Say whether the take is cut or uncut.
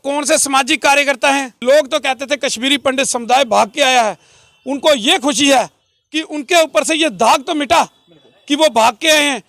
cut